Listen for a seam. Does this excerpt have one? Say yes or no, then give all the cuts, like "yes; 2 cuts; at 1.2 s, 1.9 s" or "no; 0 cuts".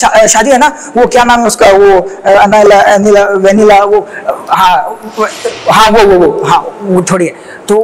no; 0 cuts